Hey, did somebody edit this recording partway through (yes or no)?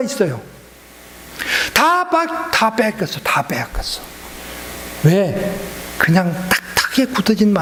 no